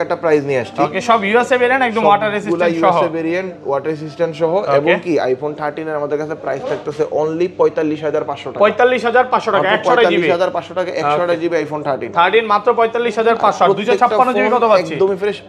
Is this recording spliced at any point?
no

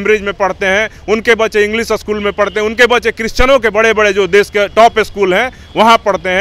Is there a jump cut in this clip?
no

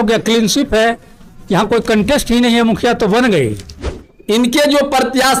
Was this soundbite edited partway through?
yes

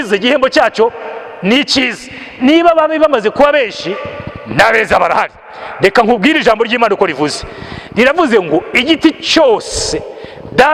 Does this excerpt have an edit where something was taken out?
no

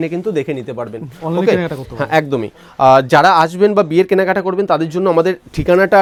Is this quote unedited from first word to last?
yes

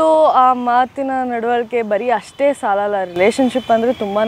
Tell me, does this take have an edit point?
no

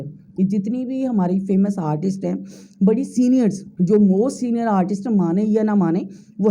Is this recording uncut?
yes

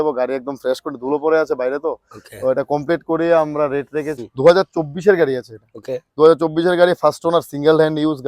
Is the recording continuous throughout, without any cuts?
no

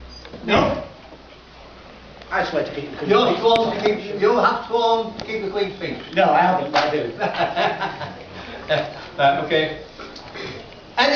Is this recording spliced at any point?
no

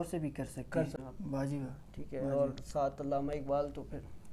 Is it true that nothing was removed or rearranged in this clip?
no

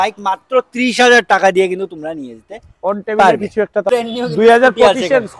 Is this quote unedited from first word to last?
no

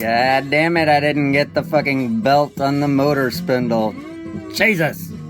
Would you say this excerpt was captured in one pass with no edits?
yes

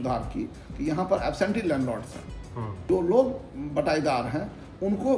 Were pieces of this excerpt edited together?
yes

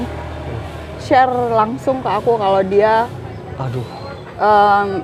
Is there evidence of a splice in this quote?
no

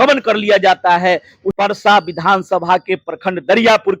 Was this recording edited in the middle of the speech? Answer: yes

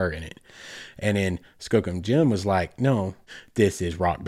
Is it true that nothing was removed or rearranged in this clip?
no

